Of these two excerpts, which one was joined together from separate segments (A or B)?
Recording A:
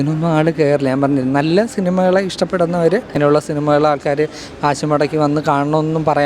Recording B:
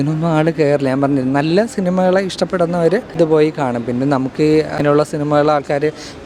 A